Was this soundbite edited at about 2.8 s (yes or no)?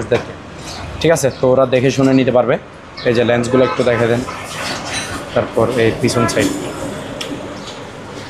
no